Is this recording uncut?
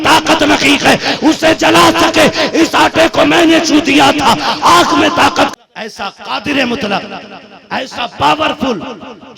no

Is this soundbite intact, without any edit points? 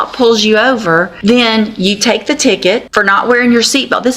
no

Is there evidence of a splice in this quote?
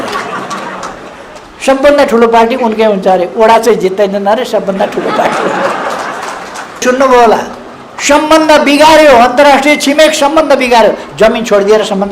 yes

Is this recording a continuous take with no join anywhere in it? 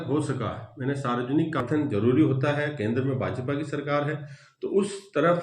no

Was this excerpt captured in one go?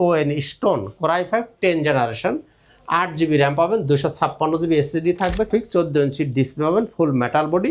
no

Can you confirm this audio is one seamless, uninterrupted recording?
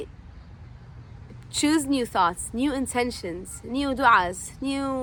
yes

